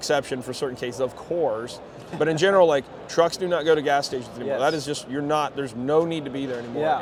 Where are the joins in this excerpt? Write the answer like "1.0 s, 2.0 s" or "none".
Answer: none